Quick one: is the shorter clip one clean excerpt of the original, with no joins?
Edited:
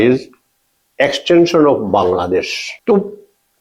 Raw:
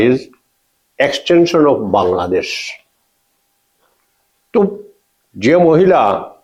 no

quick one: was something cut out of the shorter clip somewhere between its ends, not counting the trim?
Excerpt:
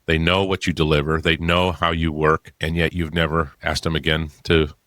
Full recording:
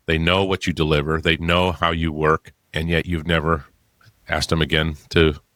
yes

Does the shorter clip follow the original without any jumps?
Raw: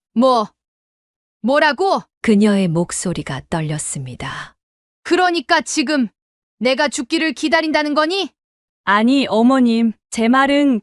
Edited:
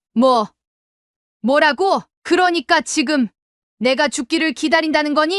no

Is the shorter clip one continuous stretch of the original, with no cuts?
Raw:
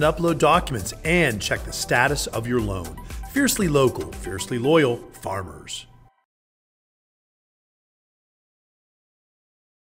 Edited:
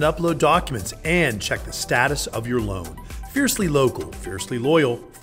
yes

